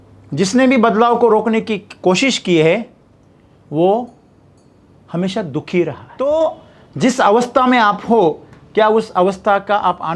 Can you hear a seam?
yes; 1 cut; at 6.0 s

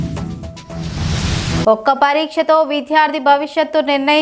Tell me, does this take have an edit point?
no; 0 cuts

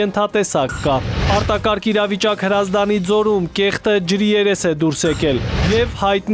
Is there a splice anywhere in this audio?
yes; 1 cut; at 1.3 s

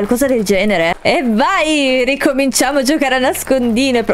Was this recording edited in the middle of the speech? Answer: yes; 1 cut; at 1.0 s

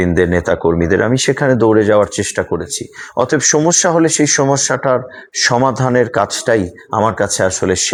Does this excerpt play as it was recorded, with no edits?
yes; 0 cuts

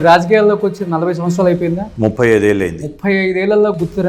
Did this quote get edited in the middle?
yes; 1 cut; at 1.9 s

